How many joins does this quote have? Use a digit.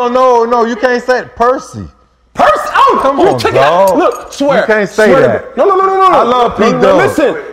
0